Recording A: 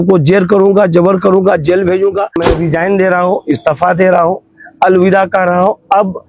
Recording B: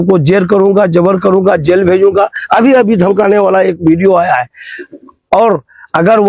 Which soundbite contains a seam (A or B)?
A